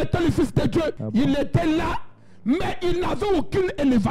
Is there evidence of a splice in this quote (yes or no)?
yes